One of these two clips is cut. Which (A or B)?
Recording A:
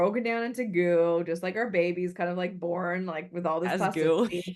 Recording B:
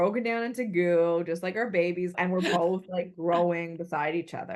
B